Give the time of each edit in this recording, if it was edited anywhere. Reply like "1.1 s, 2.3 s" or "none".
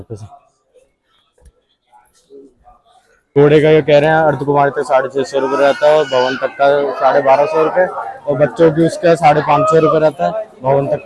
3.1 s